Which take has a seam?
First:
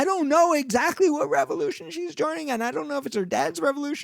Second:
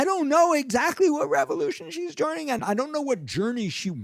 second; 1 cut; at 2.6 s

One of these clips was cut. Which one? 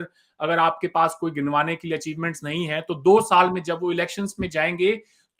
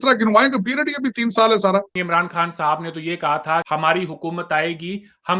second; 2 cuts; at 2.0 s, 3.7 s

